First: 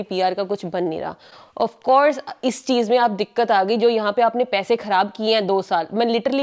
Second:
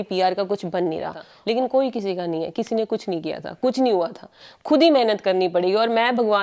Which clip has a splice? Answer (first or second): second